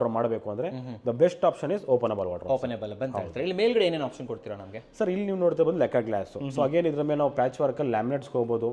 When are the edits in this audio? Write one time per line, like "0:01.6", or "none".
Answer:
none